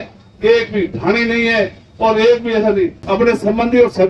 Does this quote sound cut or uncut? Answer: cut